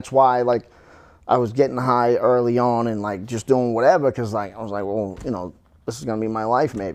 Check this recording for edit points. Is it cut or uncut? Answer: uncut